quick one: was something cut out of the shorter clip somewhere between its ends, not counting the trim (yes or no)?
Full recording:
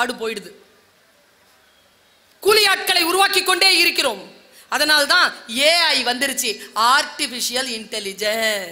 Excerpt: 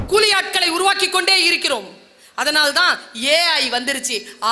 no